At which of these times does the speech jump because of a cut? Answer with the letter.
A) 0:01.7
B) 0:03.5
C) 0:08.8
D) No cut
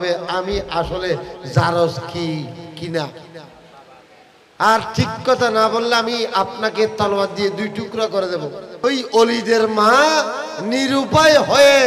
C